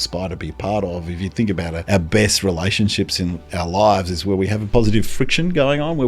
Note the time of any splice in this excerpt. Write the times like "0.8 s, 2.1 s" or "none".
1.8 s, 4.6 s